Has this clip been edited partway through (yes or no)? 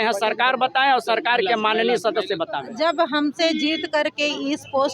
yes